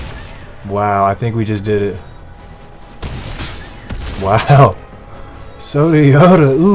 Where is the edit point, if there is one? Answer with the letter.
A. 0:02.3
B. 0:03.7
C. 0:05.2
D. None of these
A